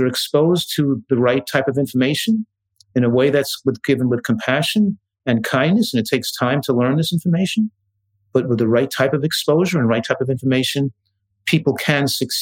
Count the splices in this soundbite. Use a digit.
0